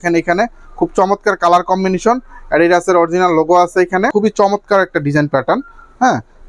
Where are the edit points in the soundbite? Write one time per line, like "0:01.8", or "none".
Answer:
0:04.1